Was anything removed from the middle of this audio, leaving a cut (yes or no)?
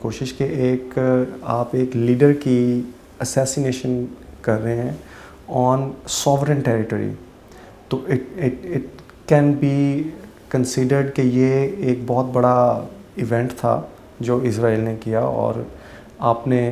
no